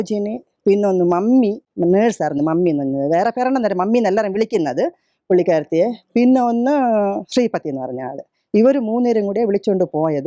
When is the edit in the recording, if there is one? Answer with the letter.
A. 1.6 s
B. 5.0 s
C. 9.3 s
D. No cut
A